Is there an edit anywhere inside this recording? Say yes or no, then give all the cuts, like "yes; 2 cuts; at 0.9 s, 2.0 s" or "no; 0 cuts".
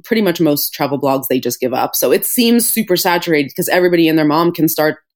no; 0 cuts